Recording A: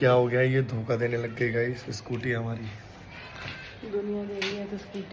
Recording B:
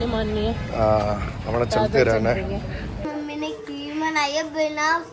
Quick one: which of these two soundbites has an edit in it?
B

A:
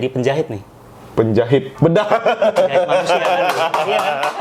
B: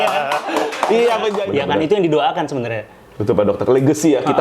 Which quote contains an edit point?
B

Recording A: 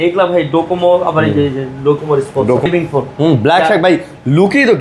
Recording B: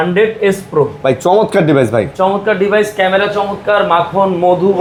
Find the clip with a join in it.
A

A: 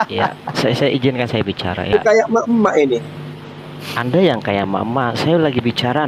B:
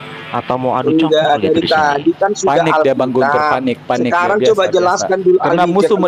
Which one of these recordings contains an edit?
A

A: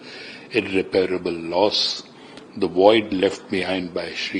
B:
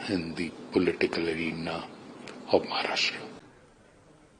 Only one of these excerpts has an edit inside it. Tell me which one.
B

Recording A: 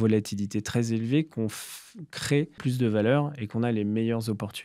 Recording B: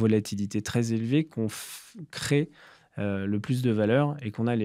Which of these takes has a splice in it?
A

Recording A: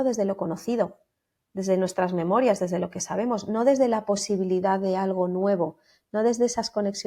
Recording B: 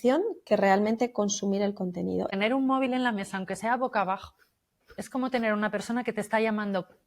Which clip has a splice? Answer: B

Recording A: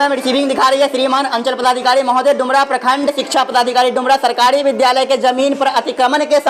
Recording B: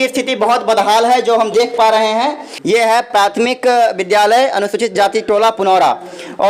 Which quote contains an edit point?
B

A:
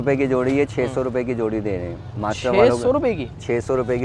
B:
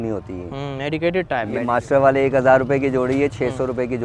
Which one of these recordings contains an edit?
B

